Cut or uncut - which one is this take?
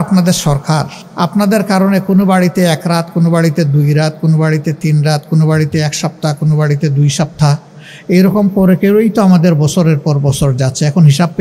cut